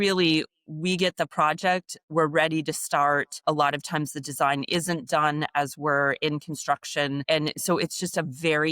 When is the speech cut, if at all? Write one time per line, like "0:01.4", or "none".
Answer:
0:03.4
0:07.2